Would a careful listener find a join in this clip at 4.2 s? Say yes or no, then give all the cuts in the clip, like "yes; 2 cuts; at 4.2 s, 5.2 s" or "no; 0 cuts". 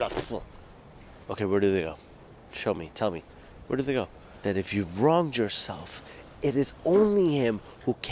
yes; 1 cut; at 4.2 s